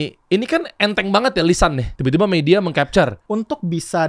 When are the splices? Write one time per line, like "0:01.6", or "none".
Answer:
0:01.9
0:03.2